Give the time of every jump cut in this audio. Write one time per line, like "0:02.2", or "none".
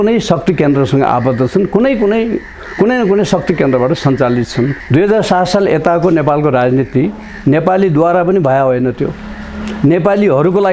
0:04.8